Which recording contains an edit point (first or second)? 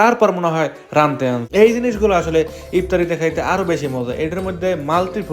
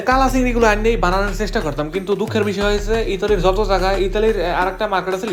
first